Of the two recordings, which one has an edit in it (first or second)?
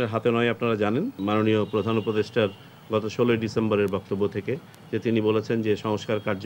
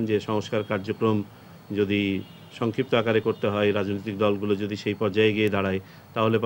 first